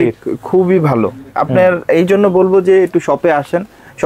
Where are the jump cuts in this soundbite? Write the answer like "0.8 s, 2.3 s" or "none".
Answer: none